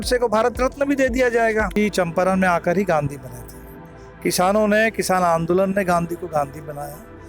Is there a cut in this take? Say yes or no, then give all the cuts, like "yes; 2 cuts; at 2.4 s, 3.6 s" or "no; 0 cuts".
yes; 1 cut; at 1.7 s